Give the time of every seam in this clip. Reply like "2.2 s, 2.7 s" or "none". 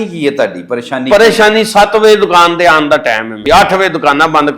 3.4 s

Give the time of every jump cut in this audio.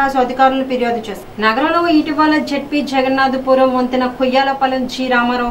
1.3 s

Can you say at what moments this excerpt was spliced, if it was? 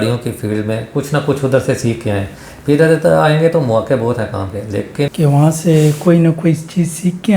5.1 s

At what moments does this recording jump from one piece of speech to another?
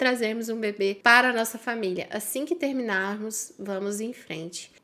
1.0 s

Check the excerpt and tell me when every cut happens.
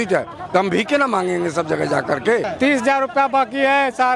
2.5 s

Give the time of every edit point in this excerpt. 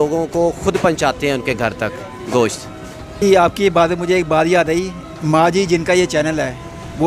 3.2 s

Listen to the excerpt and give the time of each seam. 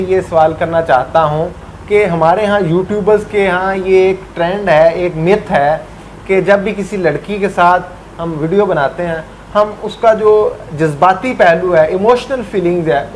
none

